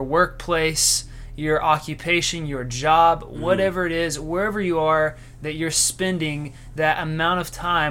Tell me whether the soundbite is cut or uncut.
uncut